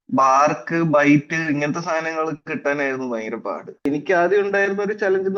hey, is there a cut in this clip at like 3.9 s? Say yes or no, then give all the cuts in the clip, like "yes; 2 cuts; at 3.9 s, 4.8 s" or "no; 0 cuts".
yes; 1 cut; at 3.9 s